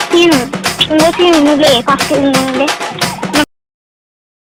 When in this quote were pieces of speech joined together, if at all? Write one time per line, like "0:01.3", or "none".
none